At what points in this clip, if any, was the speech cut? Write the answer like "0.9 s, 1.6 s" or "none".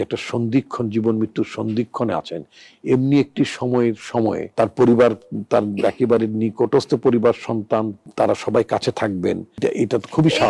9.6 s